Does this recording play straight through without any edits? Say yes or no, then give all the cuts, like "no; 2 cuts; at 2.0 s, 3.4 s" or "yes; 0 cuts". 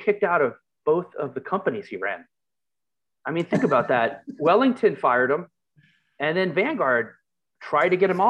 yes; 0 cuts